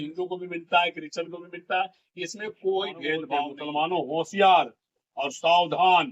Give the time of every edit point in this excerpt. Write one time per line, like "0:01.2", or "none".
0:03.5